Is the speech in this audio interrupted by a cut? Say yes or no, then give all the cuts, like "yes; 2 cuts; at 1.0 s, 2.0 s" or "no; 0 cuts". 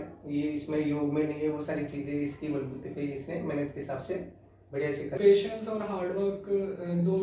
yes; 1 cut; at 5.2 s